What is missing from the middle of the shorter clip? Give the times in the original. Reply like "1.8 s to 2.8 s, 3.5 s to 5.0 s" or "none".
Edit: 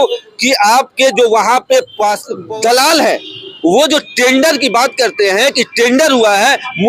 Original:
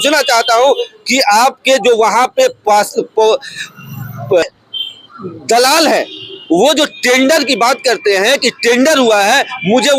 3.0 s to 5.2 s